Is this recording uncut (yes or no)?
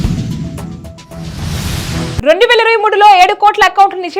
no